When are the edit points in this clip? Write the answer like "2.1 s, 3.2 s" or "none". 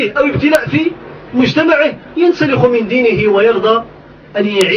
none

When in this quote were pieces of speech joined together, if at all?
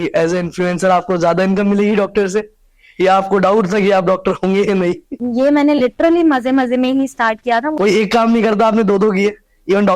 5.2 s, 7.7 s

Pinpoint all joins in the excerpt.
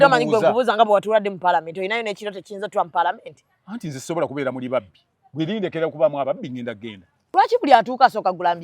7.1 s

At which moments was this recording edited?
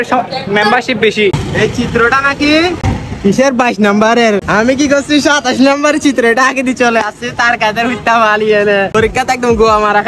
1.4 s, 2.9 s, 4.4 s, 8.9 s

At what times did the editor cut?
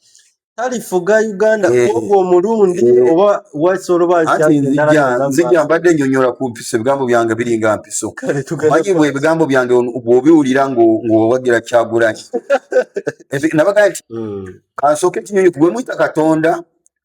14.0 s

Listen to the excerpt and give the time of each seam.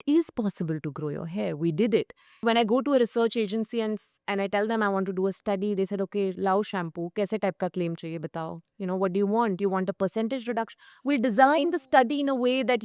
2.4 s

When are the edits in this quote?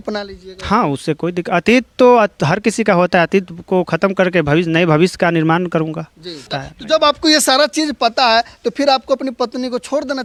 none

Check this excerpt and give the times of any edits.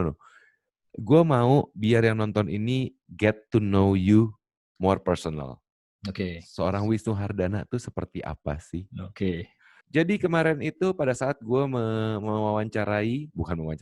9.7 s

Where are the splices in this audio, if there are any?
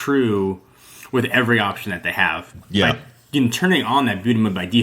2.5 s

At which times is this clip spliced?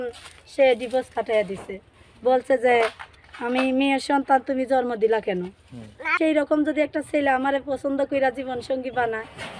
6.2 s

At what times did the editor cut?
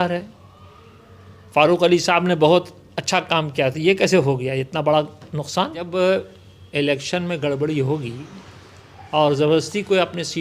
5.8 s

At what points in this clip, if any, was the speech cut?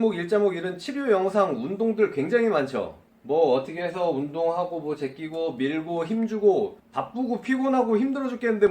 6.8 s

